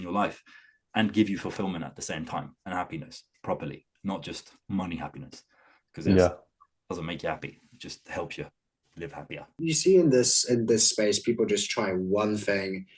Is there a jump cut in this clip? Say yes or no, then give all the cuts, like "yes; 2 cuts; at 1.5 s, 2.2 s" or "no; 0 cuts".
yes; 1 cut; at 9.7 s